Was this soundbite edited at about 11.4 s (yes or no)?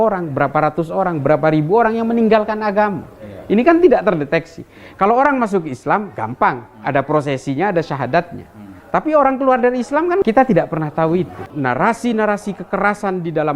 yes